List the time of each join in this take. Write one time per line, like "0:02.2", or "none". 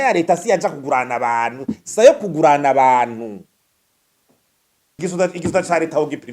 0:05.0